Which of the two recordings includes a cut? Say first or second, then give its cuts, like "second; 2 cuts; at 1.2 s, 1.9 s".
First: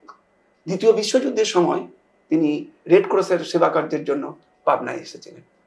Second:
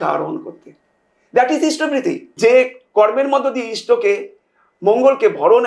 second; 1 cut; at 2.3 s